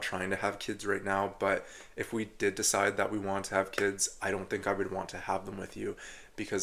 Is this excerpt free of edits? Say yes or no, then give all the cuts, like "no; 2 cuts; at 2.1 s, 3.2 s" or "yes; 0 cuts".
yes; 0 cuts